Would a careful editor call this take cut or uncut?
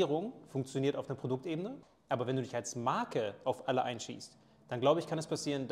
cut